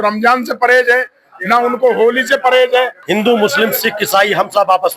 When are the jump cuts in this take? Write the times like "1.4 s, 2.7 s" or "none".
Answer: 3.0 s